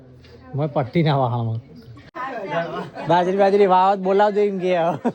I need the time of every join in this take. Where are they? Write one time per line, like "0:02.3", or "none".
0:02.1